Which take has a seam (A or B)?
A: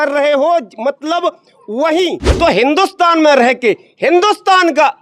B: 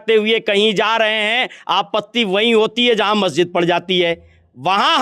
A